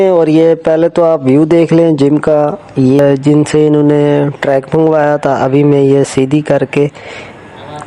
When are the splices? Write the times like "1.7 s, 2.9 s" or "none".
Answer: 3.0 s